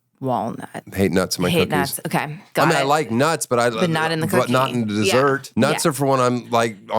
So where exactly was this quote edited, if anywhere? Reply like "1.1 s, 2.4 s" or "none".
0.8 s, 2.4 s